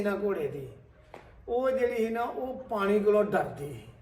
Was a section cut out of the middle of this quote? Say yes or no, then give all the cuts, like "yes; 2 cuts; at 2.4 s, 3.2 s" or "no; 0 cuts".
no; 0 cuts